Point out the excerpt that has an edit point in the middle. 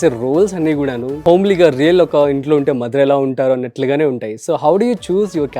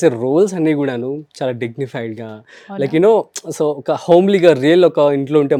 first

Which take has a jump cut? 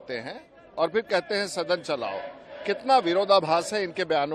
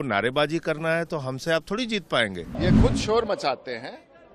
second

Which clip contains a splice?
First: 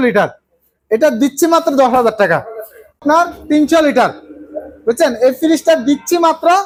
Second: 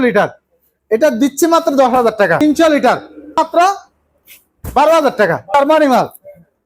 second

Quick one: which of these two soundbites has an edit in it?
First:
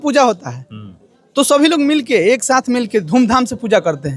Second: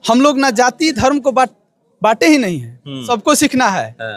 second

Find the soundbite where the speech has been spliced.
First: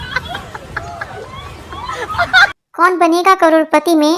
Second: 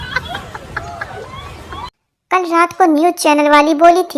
second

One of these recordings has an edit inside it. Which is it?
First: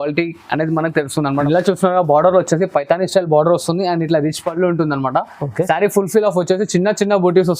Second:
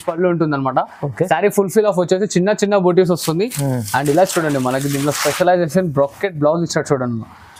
first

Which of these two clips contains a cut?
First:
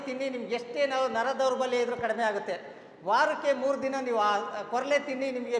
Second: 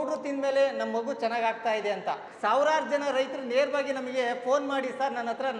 second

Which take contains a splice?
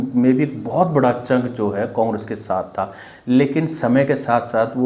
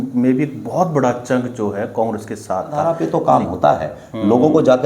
second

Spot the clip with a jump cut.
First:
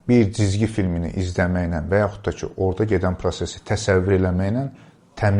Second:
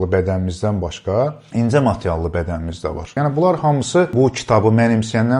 second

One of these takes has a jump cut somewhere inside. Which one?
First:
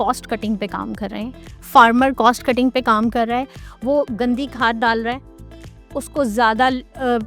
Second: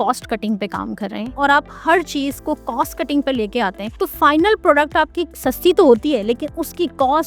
second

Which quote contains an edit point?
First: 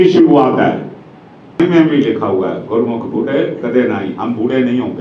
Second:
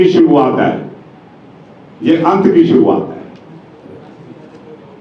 first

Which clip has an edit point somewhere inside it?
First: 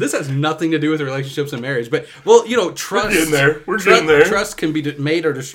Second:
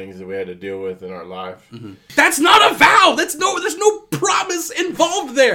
second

